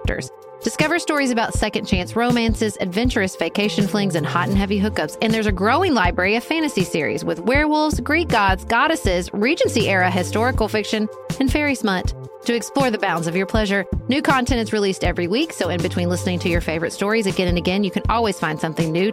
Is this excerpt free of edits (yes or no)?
yes